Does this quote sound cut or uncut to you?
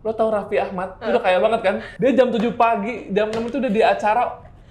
cut